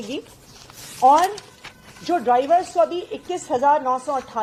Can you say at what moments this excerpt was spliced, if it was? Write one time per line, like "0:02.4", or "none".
none